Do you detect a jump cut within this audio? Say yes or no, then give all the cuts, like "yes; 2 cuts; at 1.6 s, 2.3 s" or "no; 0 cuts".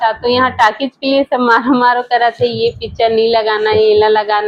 no; 0 cuts